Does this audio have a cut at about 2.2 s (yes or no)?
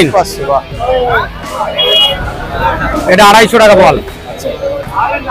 yes